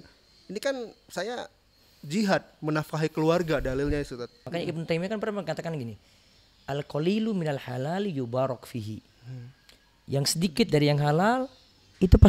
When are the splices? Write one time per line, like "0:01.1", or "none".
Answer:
0:04.4